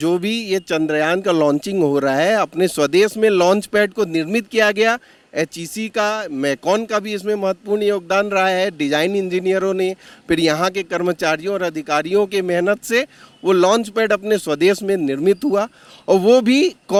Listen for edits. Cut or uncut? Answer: uncut